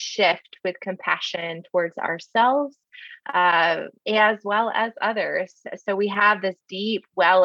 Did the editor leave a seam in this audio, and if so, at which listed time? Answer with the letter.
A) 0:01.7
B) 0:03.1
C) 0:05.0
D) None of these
D